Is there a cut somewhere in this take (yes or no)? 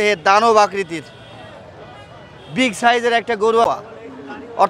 yes